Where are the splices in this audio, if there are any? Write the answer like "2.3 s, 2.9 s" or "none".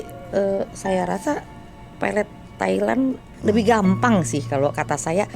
3.3 s